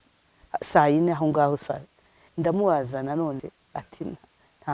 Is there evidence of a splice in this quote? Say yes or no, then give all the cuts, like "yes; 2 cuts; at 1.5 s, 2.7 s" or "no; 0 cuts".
yes; 1 cut; at 3.4 s